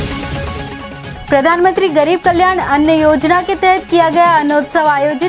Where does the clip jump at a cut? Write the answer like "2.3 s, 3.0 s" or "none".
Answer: 1.1 s